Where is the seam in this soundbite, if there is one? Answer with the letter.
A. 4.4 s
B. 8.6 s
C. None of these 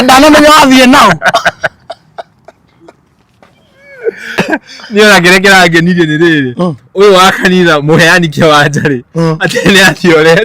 A